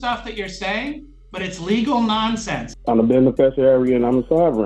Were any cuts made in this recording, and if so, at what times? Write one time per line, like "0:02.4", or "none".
0:02.7